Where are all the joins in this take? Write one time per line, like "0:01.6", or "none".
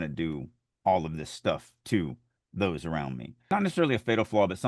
0:03.5